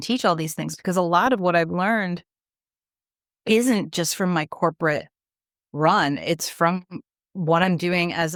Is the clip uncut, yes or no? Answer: yes